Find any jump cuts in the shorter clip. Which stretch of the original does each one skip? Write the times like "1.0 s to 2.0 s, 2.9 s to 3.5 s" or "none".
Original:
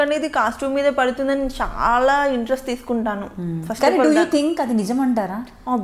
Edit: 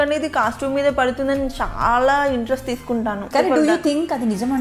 3.2 s to 3.7 s